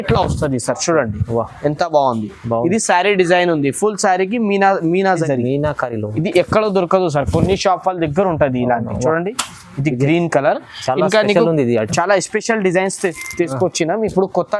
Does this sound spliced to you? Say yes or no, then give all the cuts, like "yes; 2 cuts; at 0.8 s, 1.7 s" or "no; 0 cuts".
yes; 1 cut; at 5.2 s